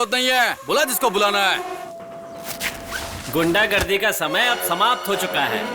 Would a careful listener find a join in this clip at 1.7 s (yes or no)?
yes